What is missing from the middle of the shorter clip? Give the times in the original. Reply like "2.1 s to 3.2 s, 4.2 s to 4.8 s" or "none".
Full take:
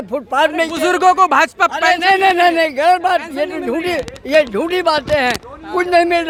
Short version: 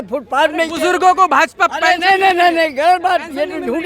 none